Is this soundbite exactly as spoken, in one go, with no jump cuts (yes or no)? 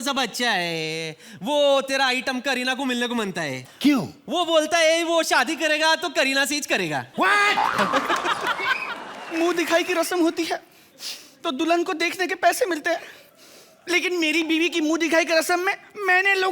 no